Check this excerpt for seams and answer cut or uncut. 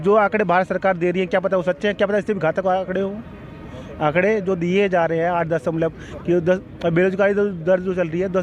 uncut